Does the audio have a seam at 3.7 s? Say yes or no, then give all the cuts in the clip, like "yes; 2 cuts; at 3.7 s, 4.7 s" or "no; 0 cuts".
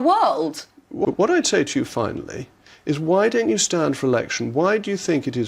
no; 1 cut; at 1.0 s